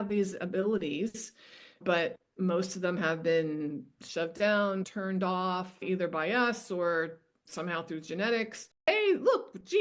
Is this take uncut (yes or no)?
no